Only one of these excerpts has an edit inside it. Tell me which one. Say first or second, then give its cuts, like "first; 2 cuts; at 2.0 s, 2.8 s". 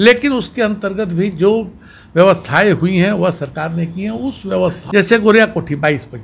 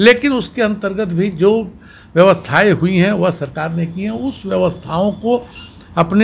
first; 1 cut; at 4.8 s